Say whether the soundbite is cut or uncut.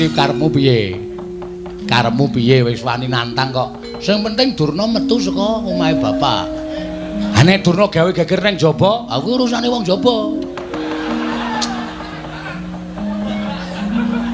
uncut